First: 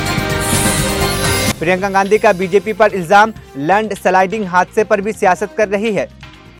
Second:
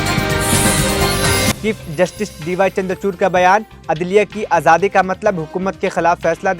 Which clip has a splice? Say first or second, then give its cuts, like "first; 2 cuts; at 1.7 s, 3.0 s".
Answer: second; 1 cut; at 1.5 s